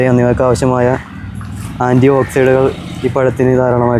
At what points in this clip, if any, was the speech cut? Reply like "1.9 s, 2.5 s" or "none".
none